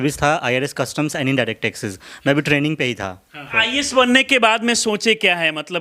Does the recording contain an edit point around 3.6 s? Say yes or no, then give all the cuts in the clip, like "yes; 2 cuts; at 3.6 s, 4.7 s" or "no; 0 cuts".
yes; 1 cut; at 3.6 s